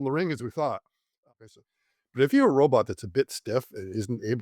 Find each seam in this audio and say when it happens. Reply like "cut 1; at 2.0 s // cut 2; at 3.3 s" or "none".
cut 1; at 1.2 s

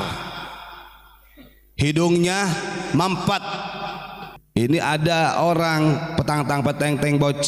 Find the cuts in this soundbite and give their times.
cut 1; at 4.4 s

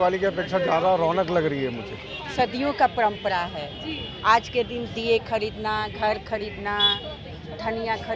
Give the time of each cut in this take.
cut 1; at 2.3 s

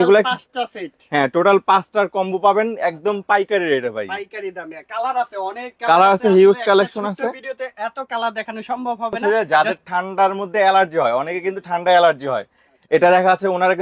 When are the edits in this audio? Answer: cut 1; at 9.2 s

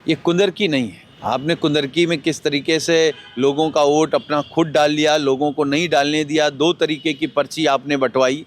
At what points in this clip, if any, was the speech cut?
cut 1; at 1.1 s

